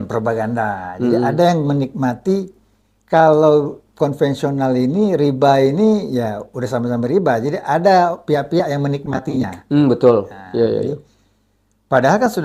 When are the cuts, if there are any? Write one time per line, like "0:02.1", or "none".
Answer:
none